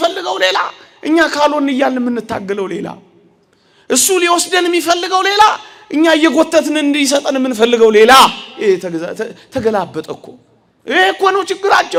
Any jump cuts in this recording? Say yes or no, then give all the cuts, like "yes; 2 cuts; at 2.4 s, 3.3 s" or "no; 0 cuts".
no; 0 cuts